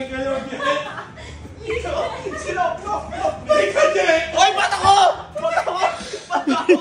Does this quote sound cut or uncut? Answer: uncut